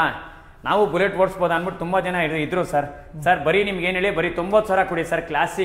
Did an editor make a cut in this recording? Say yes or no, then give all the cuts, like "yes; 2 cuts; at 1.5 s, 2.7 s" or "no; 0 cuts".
no; 0 cuts